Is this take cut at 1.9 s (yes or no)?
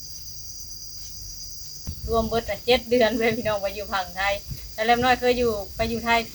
yes